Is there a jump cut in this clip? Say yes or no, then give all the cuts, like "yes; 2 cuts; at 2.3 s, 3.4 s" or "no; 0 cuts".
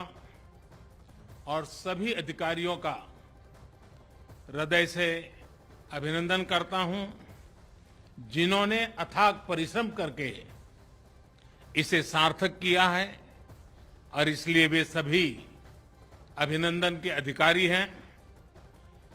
yes; 3 cuts; at 3.1 s, 4.4 s, 18.1 s